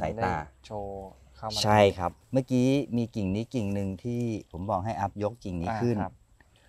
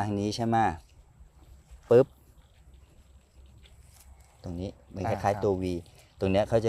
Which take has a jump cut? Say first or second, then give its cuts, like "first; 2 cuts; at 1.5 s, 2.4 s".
first; 1 cut; at 2.2 s